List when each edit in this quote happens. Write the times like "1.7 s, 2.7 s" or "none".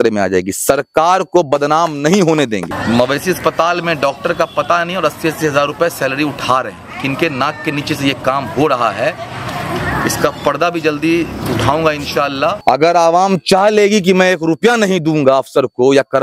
2.7 s, 12.6 s